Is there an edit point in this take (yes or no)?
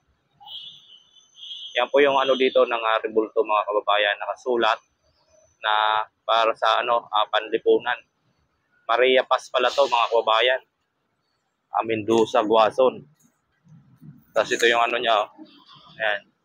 no